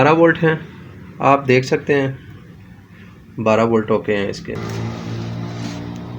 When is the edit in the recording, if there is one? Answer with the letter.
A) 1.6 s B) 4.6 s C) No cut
B